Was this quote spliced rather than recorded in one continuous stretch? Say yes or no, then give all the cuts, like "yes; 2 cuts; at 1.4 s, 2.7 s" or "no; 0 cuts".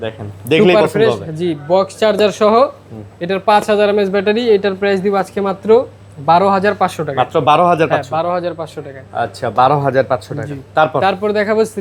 no; 0 cuts